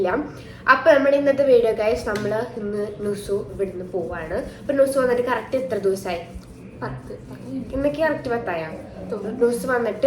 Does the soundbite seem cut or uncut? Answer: uncut